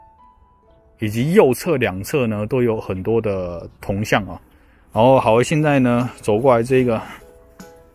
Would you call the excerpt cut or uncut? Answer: uncut